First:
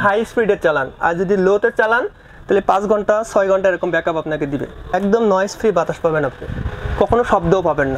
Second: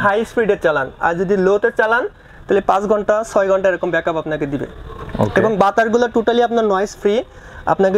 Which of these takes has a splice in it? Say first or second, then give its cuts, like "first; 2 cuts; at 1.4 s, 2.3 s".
first; 1 cut; at 4.9 s